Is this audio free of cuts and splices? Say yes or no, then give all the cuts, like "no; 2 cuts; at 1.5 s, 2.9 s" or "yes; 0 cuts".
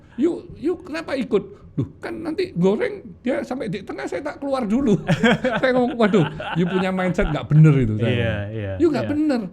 yes; 0 cuts